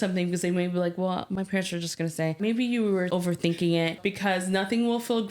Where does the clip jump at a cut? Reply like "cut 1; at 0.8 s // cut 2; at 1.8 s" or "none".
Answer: cut 1; at 2.4 s // cut 2; at 3.1 s // cut 3; at 4.0 s